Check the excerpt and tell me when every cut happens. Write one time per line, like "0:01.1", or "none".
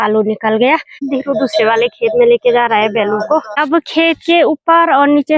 0:01.1
0:03.6